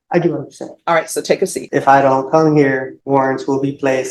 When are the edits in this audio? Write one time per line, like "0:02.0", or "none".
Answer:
0:01.6
0:02.9